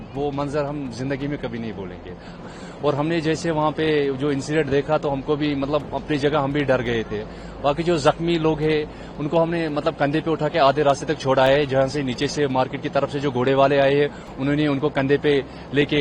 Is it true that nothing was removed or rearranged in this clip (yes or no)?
no